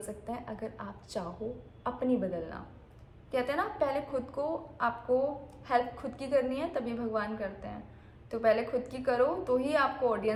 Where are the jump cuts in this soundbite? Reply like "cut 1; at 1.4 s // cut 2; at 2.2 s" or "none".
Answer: none